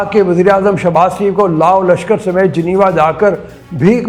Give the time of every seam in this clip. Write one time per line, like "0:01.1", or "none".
none